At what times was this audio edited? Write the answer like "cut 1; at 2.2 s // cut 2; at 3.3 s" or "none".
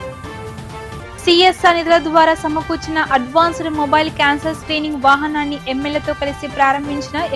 cut 1; at 1.0 s